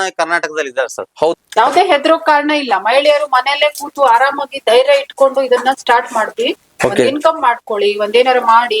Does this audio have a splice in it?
yes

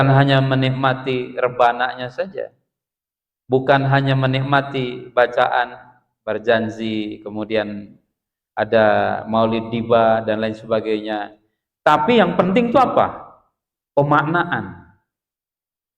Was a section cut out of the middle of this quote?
no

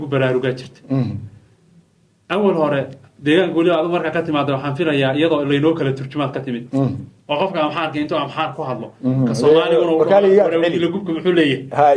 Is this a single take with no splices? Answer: yes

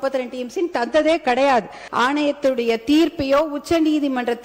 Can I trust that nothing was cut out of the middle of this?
no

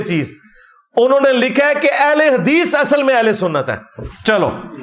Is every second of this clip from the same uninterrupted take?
yes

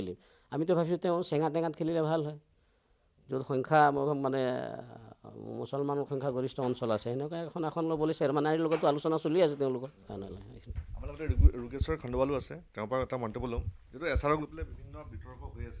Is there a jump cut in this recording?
no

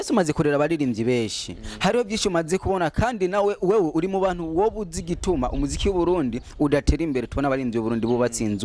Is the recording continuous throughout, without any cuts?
yes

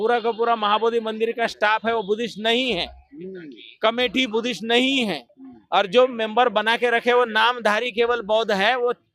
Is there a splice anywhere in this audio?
no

